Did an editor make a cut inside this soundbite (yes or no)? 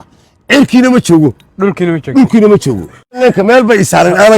yes